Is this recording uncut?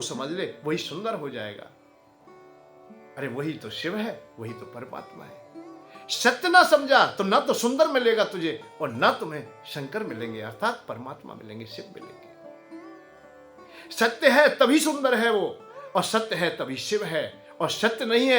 no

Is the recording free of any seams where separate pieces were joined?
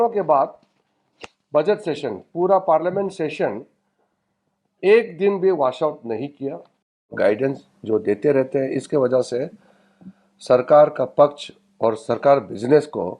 no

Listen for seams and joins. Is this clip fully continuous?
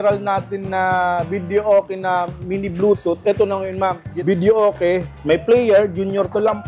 no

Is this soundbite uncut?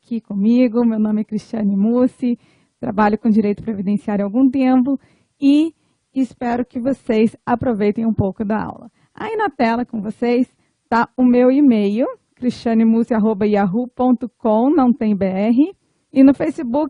no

